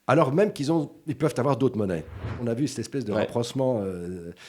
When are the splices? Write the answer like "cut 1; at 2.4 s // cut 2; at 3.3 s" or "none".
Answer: cut 1; at 2.3 s